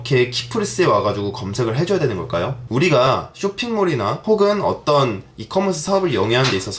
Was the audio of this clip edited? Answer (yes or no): yes